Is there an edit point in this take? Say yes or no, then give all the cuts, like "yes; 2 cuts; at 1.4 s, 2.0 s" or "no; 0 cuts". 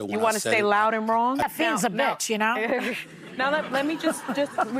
yes; 1 cut; at 1.4 s